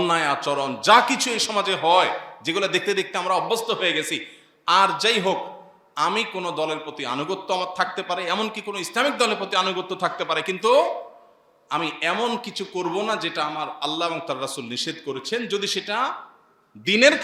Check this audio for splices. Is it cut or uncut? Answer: uncut